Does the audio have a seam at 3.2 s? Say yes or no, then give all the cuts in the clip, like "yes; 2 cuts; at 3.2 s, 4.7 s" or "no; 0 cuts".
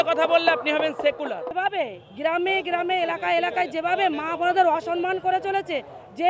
no; 1 cut; at 1.5 s